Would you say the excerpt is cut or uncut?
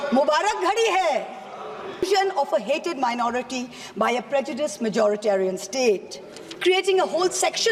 cut